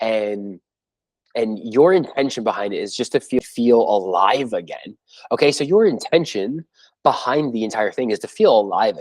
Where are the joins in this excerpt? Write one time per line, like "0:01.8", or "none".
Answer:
0:03.4